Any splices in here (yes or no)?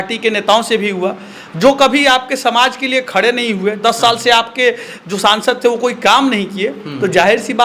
no